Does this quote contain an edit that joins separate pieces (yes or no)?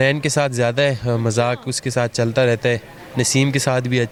no